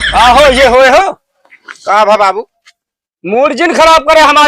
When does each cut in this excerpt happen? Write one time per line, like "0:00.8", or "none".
none

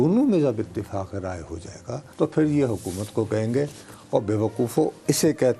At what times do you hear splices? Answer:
0:02.1

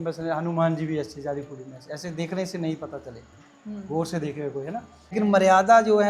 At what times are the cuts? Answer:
none

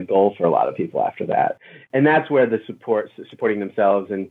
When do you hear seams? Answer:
0:01.5

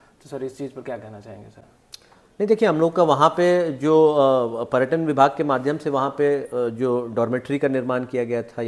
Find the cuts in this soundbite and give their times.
none

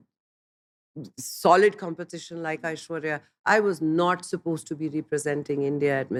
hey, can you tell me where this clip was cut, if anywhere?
none

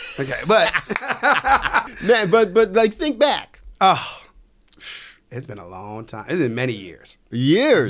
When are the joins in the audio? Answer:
0:01.9

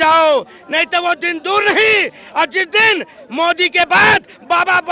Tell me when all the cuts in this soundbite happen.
none

